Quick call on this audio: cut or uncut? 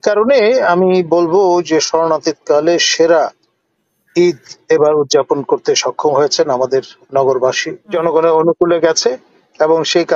cut